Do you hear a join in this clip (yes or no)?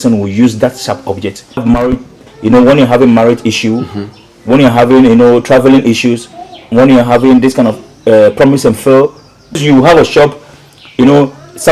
yes